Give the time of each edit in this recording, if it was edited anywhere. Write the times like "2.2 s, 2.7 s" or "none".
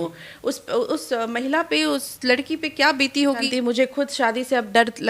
3.5 s

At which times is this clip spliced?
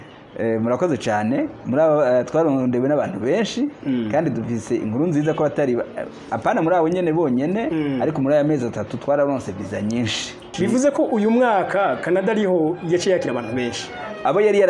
10.5 s

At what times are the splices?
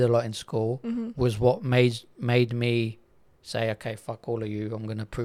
none

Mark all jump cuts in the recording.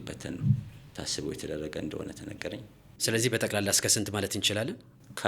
3.1 s

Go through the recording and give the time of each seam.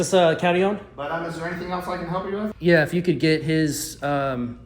0.9 s, 2.5 s

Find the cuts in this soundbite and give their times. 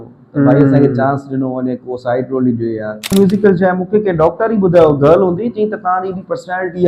3.1 s

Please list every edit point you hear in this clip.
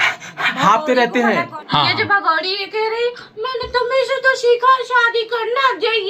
1.6 s

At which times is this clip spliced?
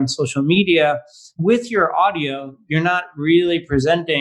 1.3 s

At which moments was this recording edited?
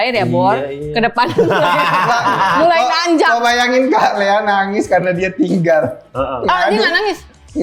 none

